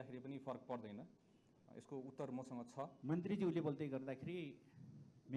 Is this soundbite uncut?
no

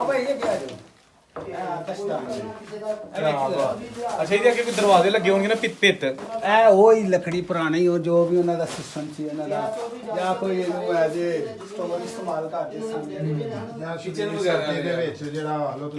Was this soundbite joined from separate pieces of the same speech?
no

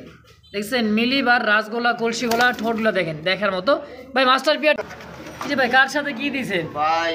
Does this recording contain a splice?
yes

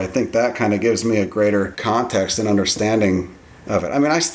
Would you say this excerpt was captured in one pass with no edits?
no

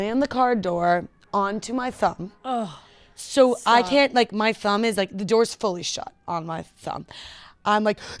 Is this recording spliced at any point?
no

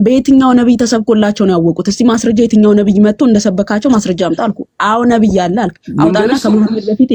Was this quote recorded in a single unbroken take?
yes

